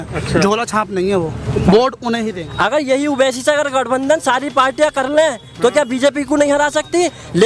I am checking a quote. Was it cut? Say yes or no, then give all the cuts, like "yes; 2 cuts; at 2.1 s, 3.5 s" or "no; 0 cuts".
yes; 1 cut; at 2.4 s